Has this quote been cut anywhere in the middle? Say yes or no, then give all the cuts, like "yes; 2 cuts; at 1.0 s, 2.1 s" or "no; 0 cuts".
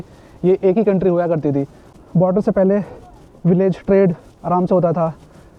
yes; 1 cut; at 1.8 s